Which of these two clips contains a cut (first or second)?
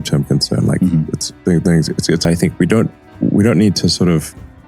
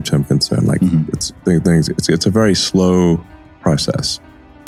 first